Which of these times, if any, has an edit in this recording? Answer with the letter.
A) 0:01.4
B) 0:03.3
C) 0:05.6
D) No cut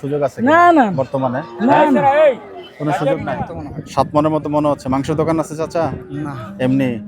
B